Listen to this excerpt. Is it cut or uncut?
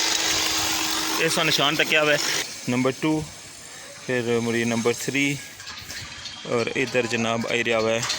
cut